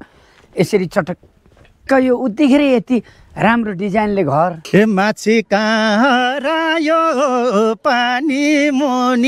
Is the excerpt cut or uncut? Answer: cut